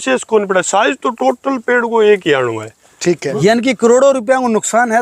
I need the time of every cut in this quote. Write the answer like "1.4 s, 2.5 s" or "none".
3.2 s